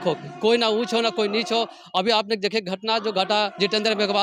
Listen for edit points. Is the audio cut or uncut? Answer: uncut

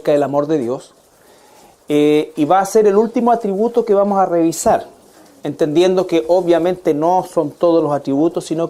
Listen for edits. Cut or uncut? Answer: uncut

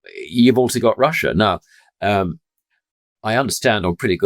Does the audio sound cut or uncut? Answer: uncut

